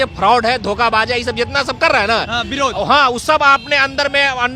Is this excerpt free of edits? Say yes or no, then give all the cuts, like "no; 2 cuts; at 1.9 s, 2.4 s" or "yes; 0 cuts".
yes; 0 cuts